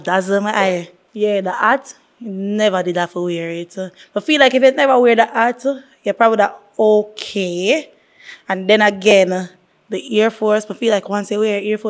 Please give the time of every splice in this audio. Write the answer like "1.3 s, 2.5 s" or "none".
1.0 s